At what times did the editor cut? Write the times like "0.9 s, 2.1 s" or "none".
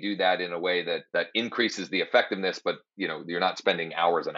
1.0 s